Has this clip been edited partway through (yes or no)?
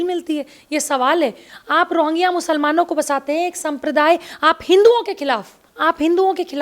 yes